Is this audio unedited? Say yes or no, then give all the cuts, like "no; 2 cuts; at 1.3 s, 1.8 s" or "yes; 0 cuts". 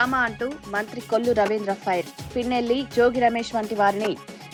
yes; 0 cuts